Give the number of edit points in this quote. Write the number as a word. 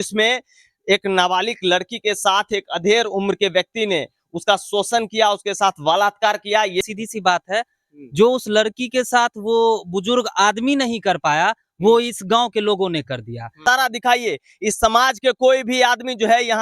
two